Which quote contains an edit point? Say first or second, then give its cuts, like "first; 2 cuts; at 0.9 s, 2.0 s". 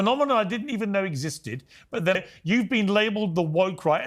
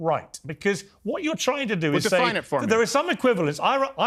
first; 1 cut; at 2.2 s